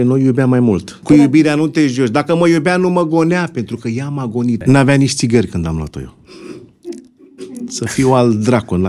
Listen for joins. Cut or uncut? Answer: cut